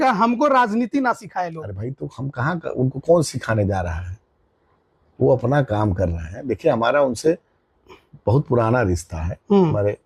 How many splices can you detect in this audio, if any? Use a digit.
0